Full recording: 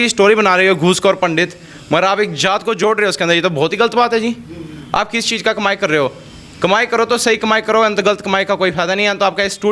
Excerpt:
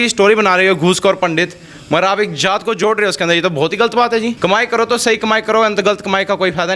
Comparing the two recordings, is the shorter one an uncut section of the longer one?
no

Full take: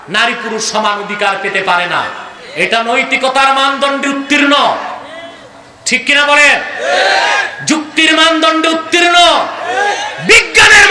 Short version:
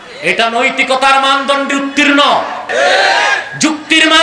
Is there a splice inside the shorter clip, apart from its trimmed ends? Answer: yes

